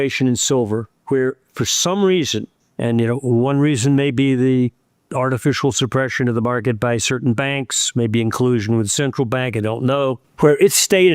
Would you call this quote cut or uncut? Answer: cut